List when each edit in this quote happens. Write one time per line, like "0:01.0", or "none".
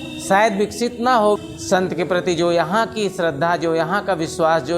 0:01.4